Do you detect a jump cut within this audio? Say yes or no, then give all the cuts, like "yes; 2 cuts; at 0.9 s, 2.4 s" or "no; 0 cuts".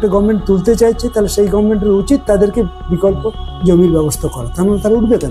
no; 0 cuts